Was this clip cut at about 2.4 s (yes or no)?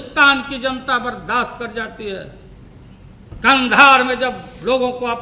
no